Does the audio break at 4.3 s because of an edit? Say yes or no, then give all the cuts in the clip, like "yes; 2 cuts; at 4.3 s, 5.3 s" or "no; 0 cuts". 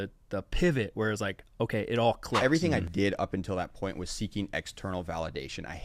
no; 1 cut; at 2.4 s